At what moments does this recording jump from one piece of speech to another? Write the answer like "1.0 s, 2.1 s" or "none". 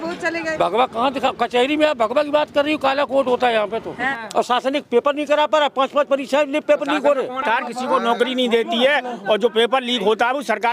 4.1 s, 7.4 s